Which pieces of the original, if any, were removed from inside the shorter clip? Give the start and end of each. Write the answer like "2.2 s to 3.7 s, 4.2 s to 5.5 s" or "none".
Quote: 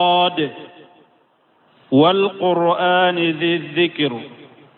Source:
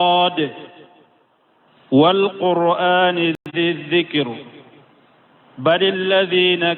3.4 s to 3.5 s